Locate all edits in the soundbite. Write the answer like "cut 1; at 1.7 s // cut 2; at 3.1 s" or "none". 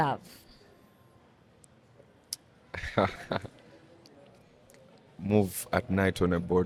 none